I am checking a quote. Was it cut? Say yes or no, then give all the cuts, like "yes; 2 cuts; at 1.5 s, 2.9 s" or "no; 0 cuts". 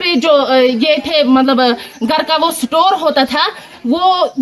no; 0 cuts